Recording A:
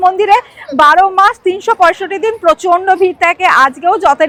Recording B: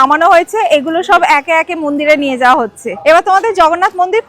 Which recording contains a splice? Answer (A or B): B